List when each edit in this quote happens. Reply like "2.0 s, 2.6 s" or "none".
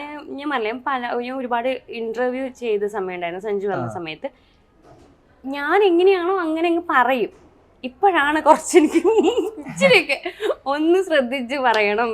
none